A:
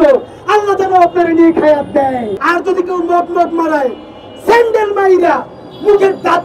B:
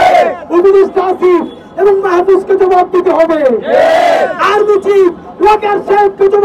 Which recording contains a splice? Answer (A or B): A